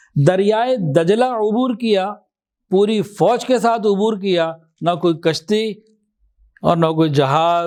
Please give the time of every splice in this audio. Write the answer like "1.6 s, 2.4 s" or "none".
none